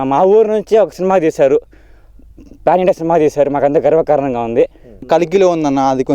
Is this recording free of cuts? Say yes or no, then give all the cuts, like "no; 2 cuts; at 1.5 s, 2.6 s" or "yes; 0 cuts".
no; 1 cut; at 5.0 s